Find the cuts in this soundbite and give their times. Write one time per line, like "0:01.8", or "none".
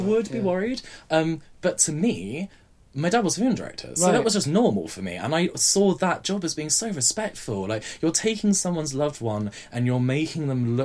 none